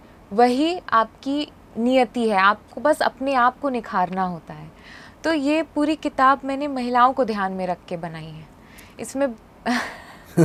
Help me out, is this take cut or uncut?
uncut